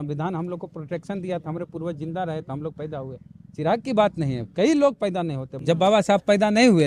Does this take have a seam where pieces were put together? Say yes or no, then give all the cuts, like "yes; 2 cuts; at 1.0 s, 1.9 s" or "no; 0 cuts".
yes; 1 cut; at 5.5 s